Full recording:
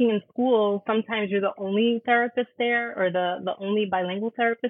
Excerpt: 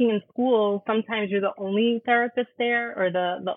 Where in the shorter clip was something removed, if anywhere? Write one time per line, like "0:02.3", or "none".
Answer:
none

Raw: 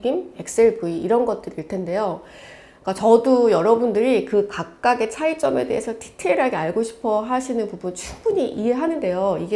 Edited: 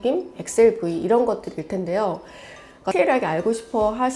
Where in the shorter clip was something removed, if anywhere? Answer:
0:02.8

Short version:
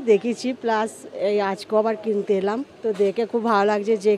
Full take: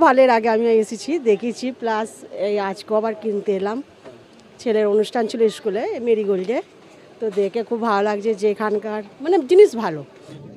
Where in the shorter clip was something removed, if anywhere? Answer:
0:02.7

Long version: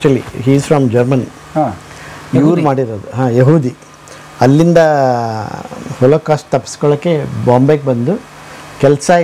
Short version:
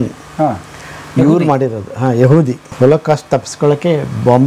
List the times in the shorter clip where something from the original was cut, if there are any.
0:02.6

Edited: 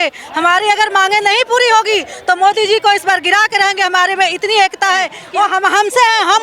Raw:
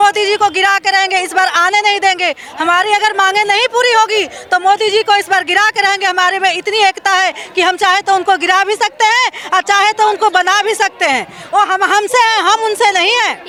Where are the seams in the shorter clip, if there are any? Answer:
0:05.2

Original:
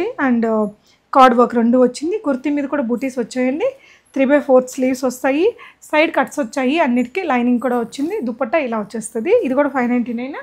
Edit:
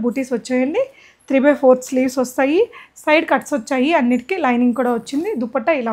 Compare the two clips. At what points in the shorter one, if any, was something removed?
none

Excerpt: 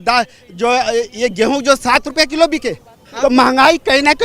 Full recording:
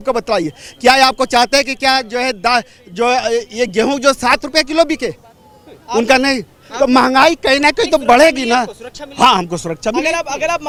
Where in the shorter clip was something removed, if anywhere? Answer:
0:03.0

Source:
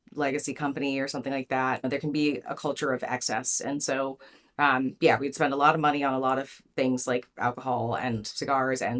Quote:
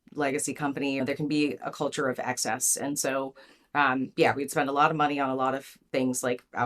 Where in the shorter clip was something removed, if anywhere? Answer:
0:01.0

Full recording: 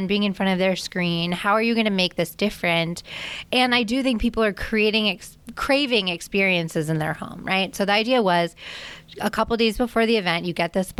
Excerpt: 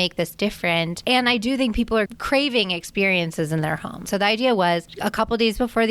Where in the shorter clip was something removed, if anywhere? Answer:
0:01.0
0:02.2
0:04.0
0:04.9

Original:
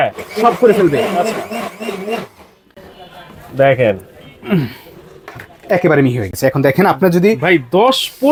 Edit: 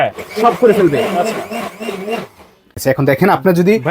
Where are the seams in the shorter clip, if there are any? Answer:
0:02.7

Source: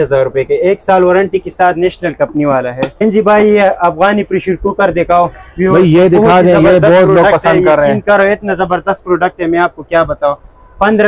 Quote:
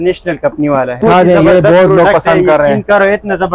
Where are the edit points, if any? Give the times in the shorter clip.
0:01.0

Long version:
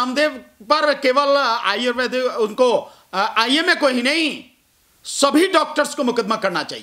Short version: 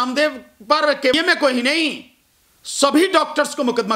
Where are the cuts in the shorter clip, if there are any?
0:01.1

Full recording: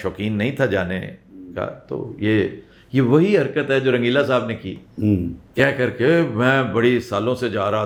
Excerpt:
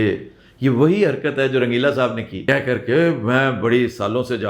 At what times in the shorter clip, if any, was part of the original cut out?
0:02.4

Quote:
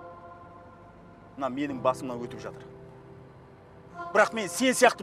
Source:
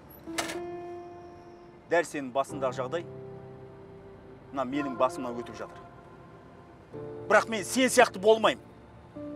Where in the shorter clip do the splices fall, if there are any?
none

